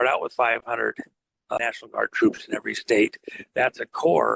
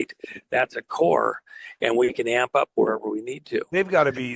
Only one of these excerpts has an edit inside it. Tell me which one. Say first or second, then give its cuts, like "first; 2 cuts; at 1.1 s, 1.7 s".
first; 1 cut; at 1.6 s